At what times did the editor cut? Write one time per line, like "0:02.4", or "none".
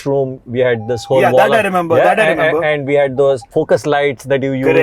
0:03.5